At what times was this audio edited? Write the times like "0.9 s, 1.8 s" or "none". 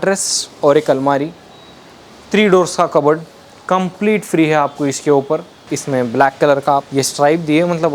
5.7 s, 6.9 s